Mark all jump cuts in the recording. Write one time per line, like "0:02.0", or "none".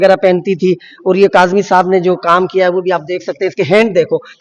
none